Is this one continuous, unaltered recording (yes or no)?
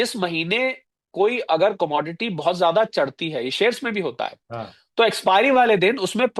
yes